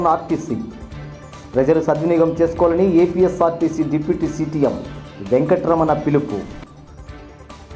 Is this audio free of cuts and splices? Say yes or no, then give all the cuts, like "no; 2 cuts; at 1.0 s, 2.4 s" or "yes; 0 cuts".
yes; 0 cuts